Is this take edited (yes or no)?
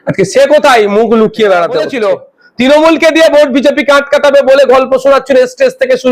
yes